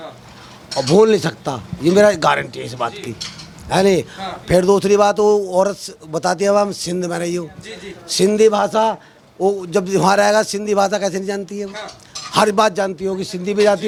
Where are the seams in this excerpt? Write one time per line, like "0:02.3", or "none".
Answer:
none